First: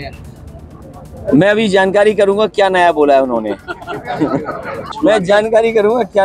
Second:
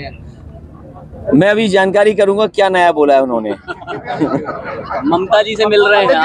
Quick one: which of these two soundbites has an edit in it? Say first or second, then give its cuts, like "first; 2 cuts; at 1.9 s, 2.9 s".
first; 1 cut; at 4.9 s